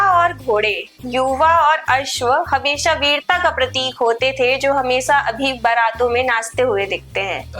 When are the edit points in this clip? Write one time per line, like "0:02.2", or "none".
none